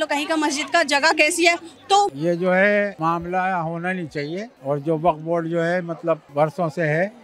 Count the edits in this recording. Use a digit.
4